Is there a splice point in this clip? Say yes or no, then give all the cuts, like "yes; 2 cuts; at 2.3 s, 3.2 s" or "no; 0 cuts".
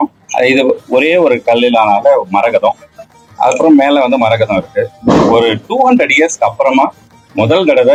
no; 0 cuts